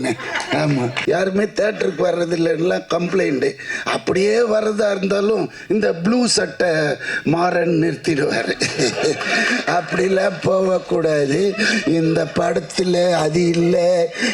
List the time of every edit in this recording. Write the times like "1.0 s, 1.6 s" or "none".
0.9 s